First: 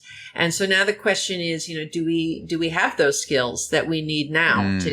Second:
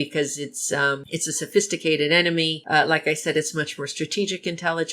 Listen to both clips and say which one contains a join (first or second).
second